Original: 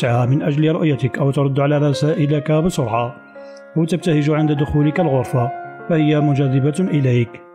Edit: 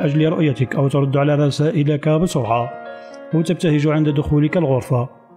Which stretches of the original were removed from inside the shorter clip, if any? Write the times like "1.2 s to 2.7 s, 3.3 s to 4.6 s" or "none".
none

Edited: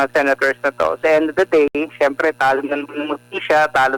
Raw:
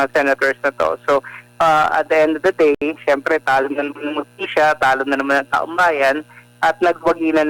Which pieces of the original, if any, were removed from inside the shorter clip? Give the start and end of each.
1.0 s to 2.1 s

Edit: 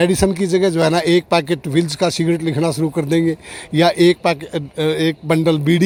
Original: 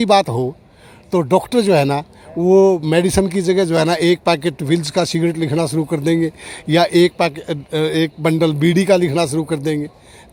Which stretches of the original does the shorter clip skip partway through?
none

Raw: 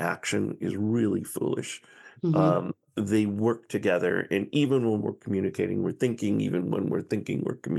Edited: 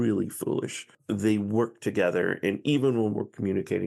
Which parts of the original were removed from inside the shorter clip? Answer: 1.9 s to 2.8 s

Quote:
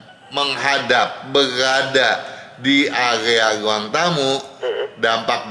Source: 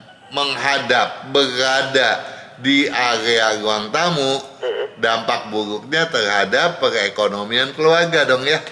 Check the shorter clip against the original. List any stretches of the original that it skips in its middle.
none

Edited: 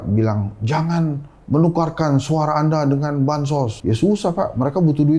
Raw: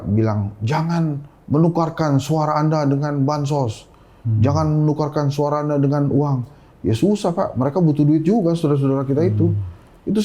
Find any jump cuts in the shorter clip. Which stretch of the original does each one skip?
3.8 s to 6.8 s

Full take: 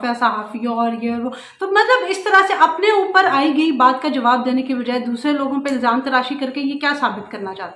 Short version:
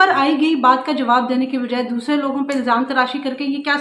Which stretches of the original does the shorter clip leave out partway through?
none

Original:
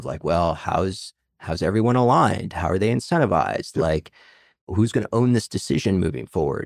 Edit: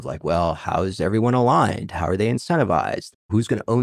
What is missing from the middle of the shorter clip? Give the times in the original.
1.0 s to 1.6 s, 3.7 s to 4.5 s

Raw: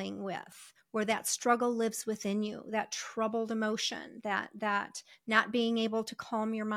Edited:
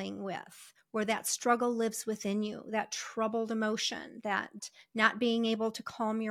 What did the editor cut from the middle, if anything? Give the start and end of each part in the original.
4.6 s to 4.9 s

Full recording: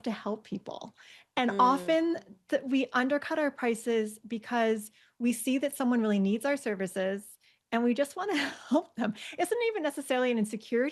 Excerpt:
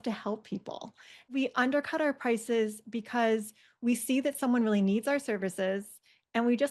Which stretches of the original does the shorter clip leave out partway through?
1.3 s to 2.7 s

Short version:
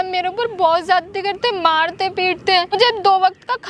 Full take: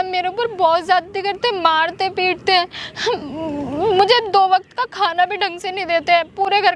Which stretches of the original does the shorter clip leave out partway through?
2.8 s to 4.0 s

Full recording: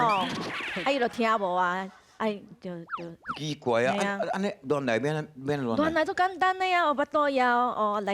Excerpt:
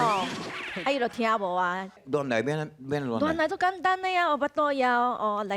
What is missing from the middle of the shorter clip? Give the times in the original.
2.0 s to 4.6 s

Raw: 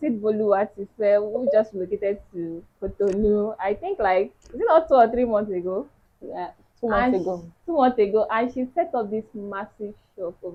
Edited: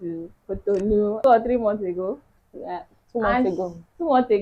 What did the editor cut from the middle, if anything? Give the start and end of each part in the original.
3.5 s to 4.9 s

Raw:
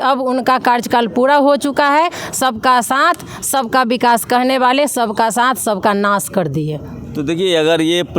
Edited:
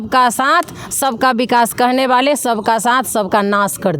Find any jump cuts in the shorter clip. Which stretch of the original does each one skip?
none

